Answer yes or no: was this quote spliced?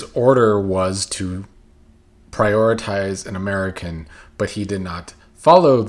no